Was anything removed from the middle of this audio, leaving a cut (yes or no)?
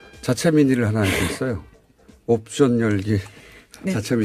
no